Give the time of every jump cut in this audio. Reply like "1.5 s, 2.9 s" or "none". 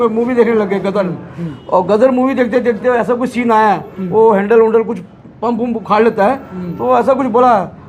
none

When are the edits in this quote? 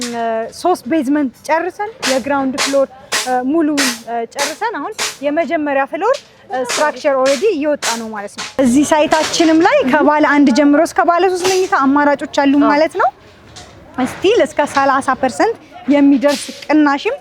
8.6 s

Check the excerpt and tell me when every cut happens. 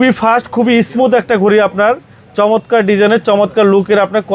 none

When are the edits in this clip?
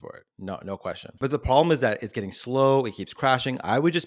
1.0 s

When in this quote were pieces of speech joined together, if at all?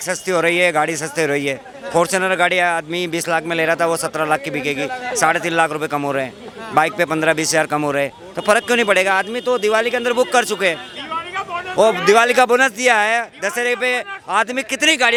none

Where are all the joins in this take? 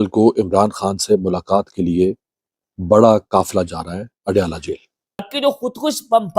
5.3 s

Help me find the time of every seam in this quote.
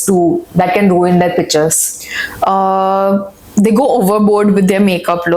none

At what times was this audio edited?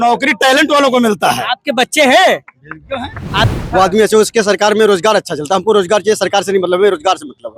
3.4 s

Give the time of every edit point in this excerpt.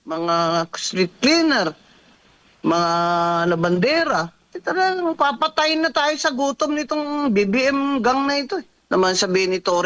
8.7 s

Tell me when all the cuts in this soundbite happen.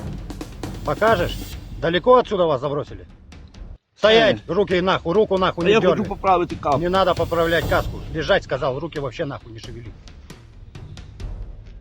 9.4 s

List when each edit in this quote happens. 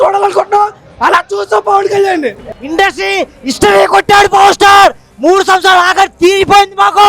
2.6 s

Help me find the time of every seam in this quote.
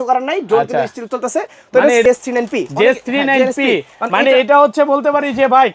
2.0 s

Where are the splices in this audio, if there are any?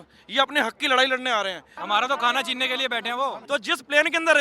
1.7 s, 3.4 s

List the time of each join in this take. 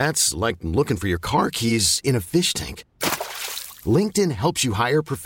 none

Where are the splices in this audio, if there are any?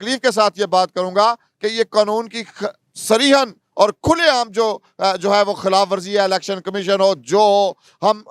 none

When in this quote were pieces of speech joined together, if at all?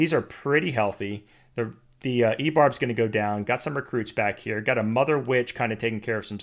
none

